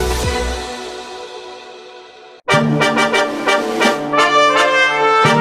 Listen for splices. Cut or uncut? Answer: uncut